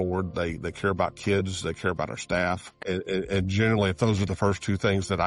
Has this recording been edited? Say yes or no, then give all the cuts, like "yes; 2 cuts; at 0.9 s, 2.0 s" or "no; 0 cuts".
yes; 1 cut; at 2.8 s